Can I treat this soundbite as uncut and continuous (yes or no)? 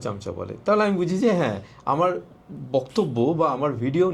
yes